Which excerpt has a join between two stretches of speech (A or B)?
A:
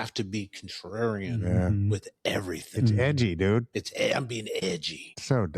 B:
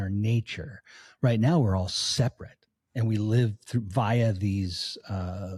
A